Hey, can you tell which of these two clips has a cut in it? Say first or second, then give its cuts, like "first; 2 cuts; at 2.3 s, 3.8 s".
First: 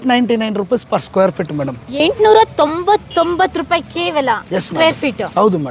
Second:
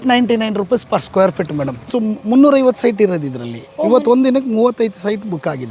second; 1 cut; at 1.9 s